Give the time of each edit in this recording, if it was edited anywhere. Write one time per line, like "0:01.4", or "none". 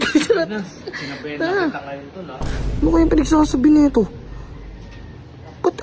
0:02.6